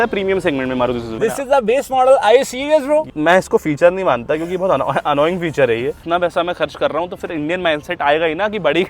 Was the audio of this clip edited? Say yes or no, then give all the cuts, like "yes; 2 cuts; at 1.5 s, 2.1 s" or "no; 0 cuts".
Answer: yes; 3 cuts; at 1.1 s, 3.1 s, 6.0 s